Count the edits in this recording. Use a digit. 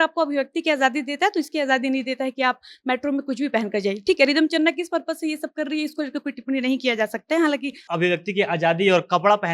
1